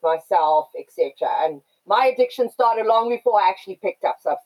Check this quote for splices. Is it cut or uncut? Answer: uncut